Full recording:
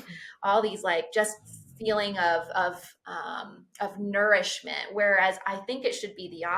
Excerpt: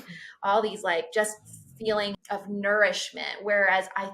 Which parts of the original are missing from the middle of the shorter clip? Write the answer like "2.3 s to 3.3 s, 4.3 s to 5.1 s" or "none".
2.1 s to 3.6 s